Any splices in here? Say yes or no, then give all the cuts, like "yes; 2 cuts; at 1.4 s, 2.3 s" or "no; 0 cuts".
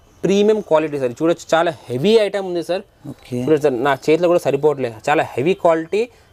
no; 0 cuts